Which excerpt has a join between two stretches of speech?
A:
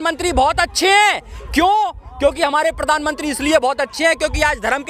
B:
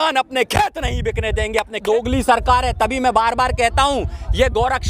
B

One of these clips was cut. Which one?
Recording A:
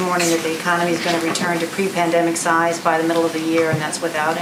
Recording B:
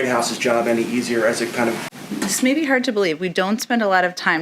B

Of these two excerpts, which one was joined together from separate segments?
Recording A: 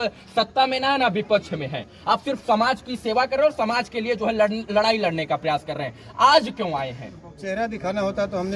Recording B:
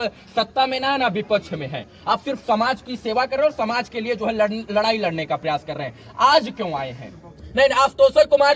B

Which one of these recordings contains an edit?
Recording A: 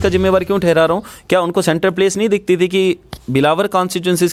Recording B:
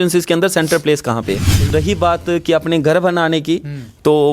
B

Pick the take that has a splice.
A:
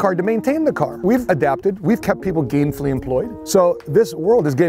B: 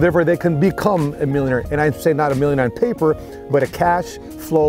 A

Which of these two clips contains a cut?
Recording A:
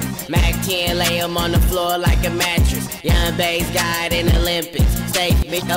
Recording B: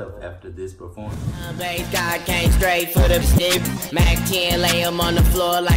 B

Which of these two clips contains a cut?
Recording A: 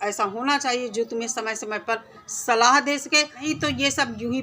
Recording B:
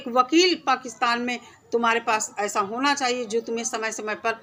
A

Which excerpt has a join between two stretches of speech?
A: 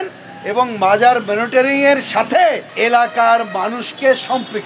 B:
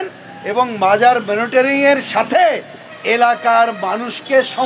A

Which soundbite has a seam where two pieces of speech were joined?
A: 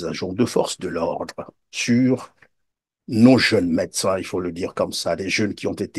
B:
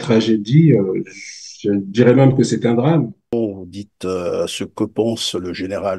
B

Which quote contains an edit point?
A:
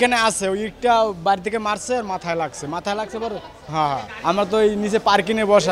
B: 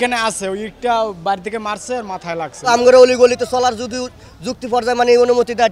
B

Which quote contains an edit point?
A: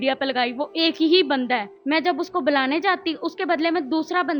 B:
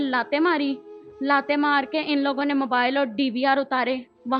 A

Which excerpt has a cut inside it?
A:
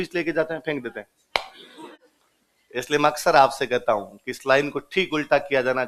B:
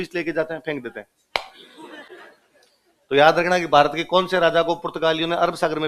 A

